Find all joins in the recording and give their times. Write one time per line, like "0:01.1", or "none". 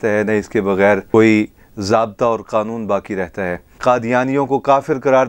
0:01.0
0:03.7